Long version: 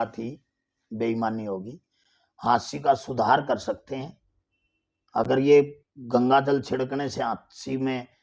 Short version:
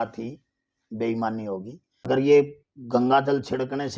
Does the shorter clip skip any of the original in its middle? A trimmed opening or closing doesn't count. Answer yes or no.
yes